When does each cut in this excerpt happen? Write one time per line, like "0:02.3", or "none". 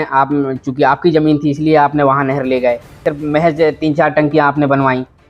0:02.9